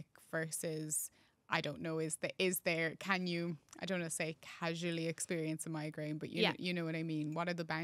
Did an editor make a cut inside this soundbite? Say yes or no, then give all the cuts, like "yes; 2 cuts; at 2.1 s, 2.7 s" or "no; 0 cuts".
no; 0 cuts